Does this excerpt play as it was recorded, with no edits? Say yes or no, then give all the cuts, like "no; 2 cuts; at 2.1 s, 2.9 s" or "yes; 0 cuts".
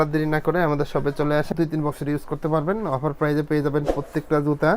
no; 1 cut; at 1.5 s